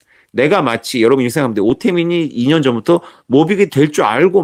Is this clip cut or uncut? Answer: uncut